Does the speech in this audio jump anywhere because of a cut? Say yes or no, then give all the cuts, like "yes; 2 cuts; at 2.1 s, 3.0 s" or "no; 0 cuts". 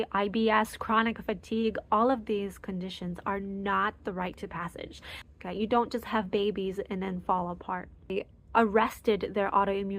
yes; 2 cuts; at 5.1 s, 8.1 s